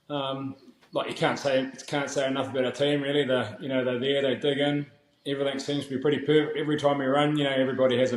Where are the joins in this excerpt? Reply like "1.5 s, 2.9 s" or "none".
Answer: none